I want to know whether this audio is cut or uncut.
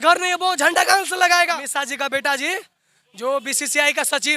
cut